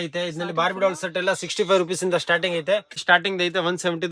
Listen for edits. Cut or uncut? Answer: cut